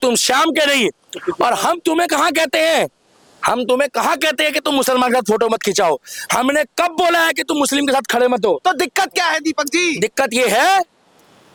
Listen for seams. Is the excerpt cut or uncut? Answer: uncut